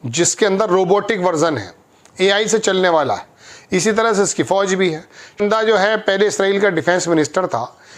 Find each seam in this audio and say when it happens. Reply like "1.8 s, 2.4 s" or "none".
5.4 s